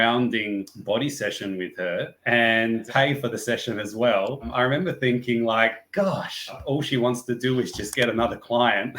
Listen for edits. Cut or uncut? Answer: cut